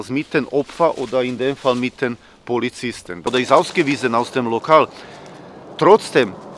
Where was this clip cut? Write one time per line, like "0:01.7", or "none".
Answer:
0:03.3